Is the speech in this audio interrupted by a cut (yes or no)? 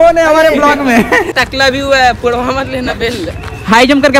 yes